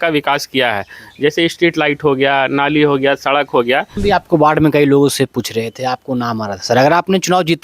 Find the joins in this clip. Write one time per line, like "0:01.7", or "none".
0:04.0